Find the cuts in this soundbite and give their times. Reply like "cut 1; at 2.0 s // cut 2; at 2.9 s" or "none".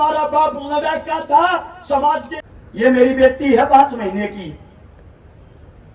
cut 1; at 2.4 s